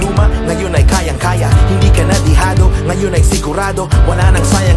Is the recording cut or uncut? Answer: uncut